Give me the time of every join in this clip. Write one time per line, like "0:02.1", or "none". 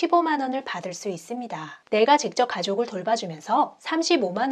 0:01.8

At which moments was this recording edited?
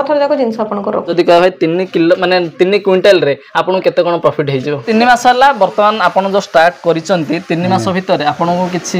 0:01.1
0:04.9

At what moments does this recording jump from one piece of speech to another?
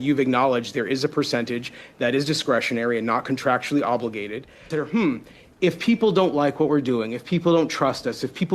0:04.7

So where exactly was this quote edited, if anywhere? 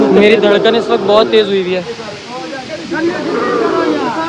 none

